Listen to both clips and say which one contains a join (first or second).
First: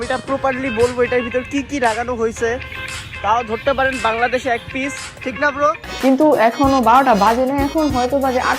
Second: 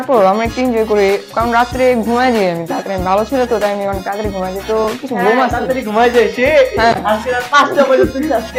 first